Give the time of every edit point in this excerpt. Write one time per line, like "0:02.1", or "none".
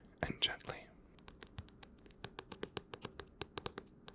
0:01.2